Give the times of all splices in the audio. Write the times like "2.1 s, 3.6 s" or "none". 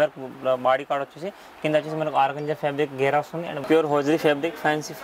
3.6 s